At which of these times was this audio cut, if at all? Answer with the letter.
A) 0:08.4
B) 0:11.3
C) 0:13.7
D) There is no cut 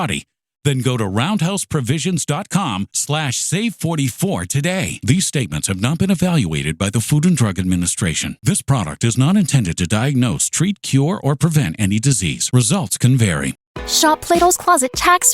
C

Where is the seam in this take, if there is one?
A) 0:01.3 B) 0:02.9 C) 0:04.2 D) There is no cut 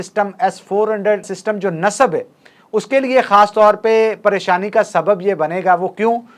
A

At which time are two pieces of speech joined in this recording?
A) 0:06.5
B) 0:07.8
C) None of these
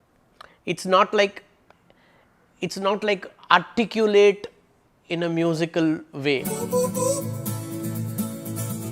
A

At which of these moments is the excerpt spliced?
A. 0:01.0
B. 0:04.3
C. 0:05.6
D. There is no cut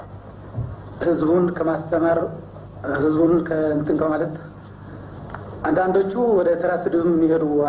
D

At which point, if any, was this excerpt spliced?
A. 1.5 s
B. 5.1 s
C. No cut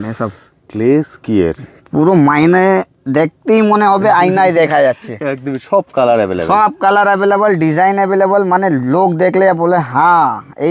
C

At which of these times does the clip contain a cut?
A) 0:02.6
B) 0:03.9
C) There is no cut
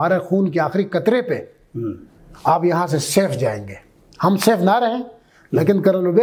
C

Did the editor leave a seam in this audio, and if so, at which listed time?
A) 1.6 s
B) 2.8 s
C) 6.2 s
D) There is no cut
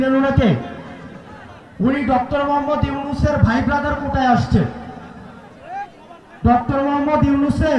D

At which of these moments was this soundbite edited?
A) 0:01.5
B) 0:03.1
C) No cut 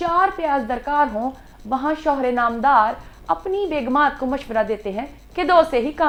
C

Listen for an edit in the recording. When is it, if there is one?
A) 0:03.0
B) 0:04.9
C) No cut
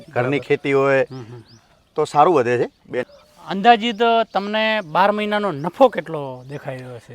A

